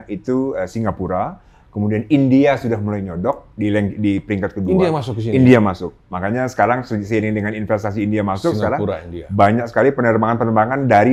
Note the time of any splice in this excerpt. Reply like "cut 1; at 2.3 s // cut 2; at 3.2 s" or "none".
none

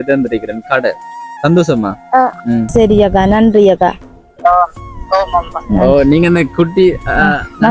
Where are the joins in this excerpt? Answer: cut 1; at 2.7 s

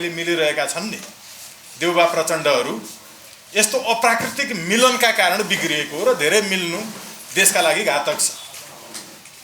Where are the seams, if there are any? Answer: none

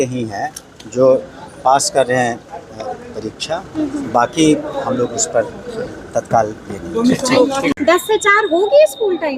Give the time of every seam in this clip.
cut 1; at 7.8 s

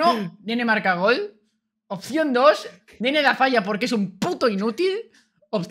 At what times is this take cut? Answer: none

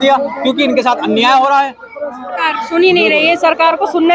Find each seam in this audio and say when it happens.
cut 1; at 2.4 s

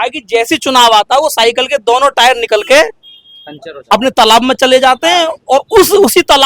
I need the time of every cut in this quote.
none

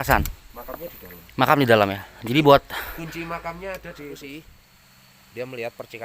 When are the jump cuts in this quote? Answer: cut 1; at 4.3 s

